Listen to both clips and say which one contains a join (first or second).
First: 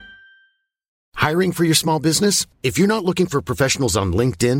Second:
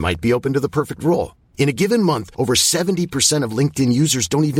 first